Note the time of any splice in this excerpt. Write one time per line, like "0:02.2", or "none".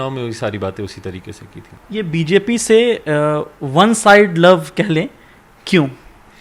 0:01.8